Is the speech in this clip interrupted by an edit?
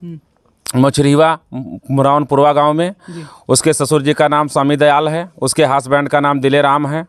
no; 0 cuts

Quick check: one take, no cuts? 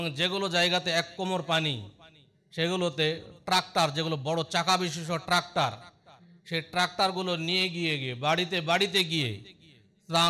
yes; 0 cuts

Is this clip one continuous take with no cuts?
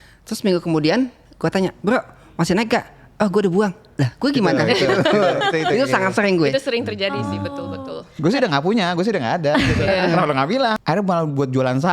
no; 1 cut; at 10.8 s

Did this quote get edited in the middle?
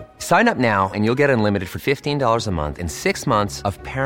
no; 0 cuts

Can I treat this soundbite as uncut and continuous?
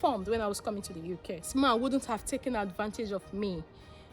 no; 1 cut; at 1.5 s

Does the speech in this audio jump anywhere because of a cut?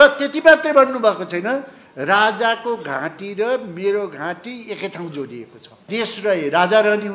yes; 1 cut; at 5.8 s

